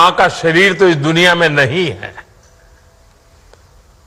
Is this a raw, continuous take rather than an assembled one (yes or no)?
yes